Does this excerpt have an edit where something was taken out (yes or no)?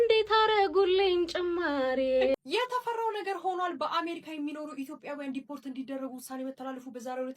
yes